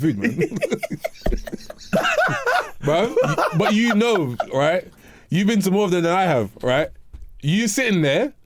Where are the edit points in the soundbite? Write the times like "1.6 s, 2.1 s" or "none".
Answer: 1.8 s